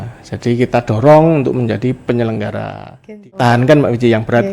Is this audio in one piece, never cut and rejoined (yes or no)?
no